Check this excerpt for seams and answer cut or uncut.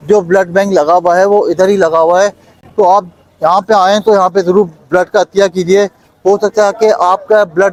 uncut